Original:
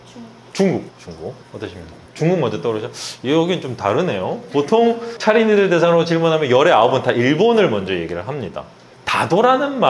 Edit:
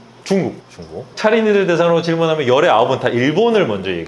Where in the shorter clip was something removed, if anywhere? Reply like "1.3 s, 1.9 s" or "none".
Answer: 1.1 s